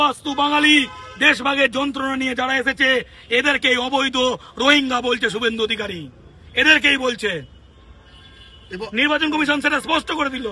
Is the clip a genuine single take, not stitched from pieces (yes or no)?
yes